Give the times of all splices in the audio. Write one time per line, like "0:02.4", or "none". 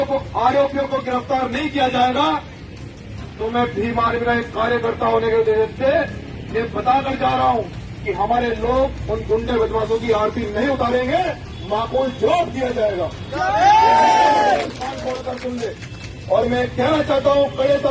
none